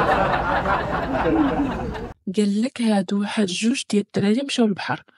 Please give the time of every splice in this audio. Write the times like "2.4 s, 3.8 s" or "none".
2.0 s